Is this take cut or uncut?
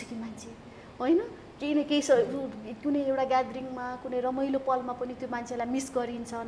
uncut